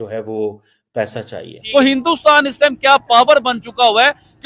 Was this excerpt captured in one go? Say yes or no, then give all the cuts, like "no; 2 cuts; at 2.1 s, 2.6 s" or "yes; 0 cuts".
no; 1 cut; at 1.5 s